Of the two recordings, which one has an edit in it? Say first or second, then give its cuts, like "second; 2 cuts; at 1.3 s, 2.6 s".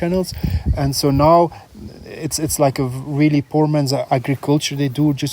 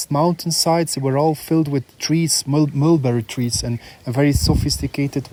first; 1 cut; at 4.0 s